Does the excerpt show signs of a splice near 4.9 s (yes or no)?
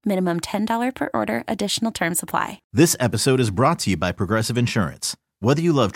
no